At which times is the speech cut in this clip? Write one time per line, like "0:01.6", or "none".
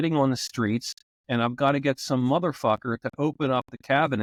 none